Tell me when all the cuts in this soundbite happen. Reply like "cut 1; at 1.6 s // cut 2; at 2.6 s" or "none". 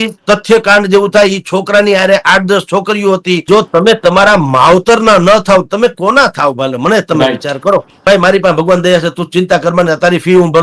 cut 1; at 3.4 s // cut 2; at 7.9 s